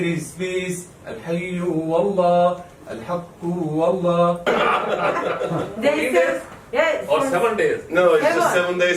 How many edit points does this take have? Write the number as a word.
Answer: one